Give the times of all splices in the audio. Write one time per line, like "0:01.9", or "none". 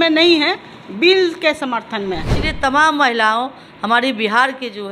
0:02.4